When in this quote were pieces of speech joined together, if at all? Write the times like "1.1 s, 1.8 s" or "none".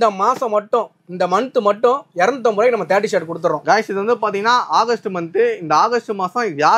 none